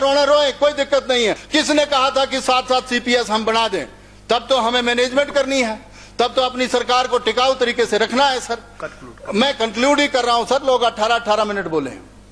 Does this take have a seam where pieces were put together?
yes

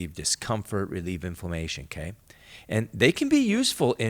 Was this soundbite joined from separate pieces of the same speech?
no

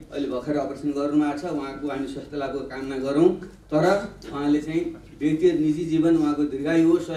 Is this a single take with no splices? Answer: yes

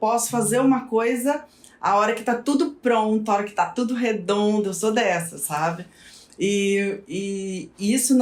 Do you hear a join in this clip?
no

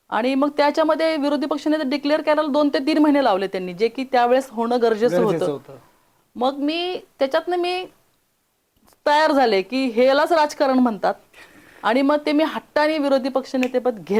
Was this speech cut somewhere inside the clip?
no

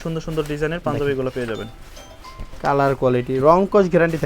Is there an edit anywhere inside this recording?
no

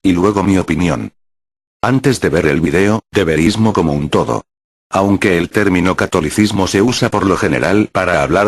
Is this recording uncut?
yes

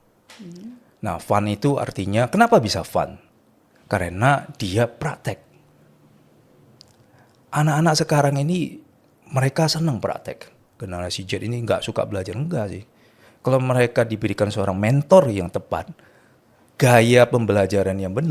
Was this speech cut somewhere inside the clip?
yes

